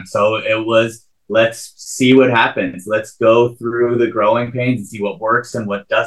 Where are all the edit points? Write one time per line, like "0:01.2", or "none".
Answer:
none